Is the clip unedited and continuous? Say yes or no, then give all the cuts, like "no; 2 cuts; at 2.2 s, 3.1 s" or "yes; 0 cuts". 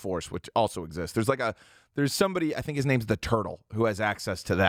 yes; 0 cuts